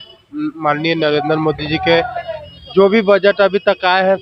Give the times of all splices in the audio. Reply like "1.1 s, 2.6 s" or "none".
none